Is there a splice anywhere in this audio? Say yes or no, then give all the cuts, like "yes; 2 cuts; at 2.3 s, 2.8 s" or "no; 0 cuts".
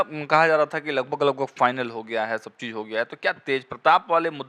no; 0 cuts